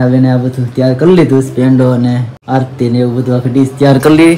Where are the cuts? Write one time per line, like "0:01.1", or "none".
0:02.3

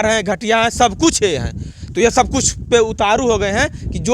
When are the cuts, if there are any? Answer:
none

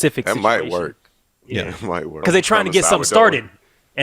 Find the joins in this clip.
0:02.2

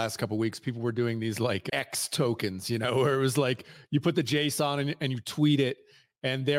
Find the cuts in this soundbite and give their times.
0:01.6

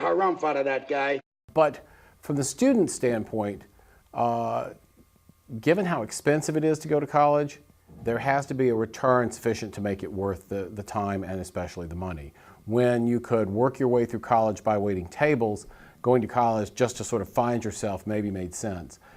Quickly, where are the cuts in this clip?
0:11.3

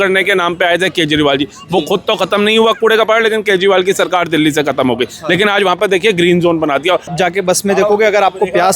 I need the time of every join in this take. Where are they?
0:07.1

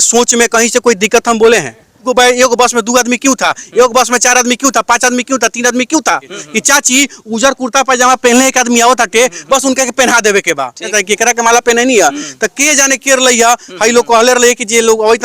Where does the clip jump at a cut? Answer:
0:02.1
0:06.4
0:10.9

